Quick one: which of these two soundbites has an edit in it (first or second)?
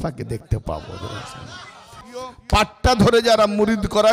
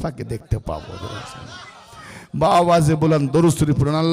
first